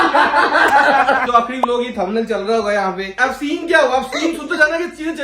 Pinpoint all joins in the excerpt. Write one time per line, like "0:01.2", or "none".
0:01.2
0:03.1